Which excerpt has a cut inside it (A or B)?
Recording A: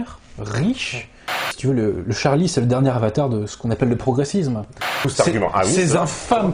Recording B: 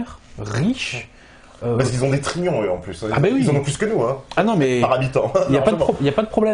A